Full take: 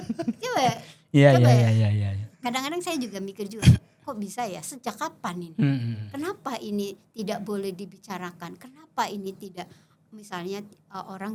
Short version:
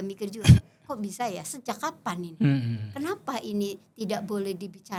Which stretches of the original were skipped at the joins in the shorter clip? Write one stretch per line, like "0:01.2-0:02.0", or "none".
none